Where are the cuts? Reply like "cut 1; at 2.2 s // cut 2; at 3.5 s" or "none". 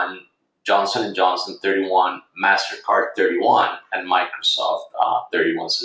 none

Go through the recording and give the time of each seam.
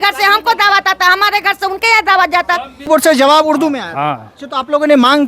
cut 1; at 2.8 s

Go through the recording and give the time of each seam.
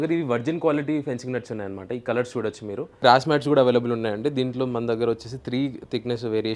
cut 1; at 3.0 s

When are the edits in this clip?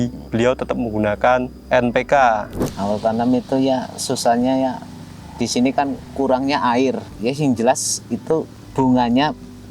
cut 1; at 2.7 s // cut 2; at 7.1 s

